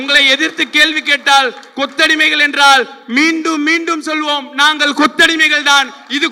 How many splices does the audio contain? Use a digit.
0